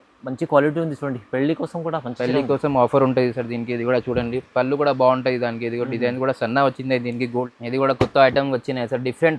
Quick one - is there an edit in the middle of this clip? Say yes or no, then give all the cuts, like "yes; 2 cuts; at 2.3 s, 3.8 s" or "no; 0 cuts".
yes; 1 cut; at 7.5 s